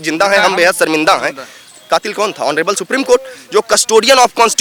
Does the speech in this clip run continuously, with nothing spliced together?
yes; 0 cuts

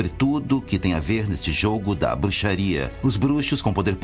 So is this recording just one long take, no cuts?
no; 1 cut; at 1.0 s

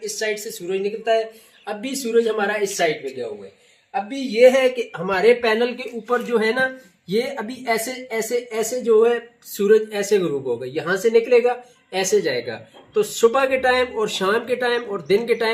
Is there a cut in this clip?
no; 0 cuts

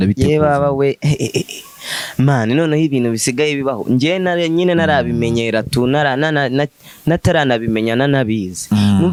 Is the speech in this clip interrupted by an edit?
no; 0 cuts

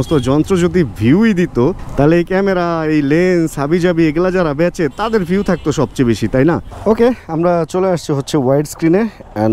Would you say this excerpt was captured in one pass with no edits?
no; 1 cut; at 6.7 s

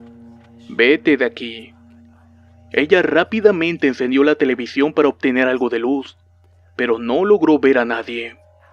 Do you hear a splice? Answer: no; 0 cuts

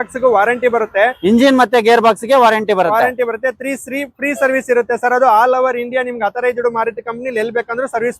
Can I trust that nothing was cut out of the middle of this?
yes; 0 cuts

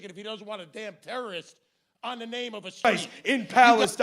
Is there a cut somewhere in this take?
yes; 1 cut; at 2.8 s

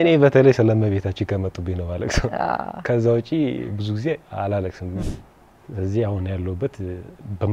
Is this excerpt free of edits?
no; 1 cut; at 5.0 s

